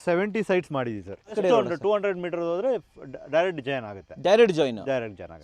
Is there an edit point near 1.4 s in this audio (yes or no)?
yes